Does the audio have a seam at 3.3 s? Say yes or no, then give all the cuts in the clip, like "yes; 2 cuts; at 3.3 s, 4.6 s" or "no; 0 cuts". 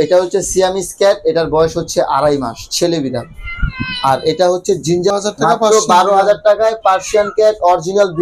no; 1 cut; at 5.1 s